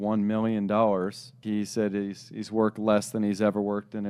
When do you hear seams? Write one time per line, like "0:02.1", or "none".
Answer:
0:01.4